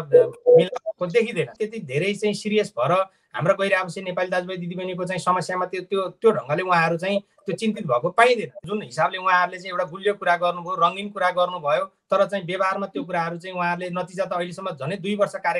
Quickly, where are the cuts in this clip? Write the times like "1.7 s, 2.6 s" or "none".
1.5 s, 8.5 s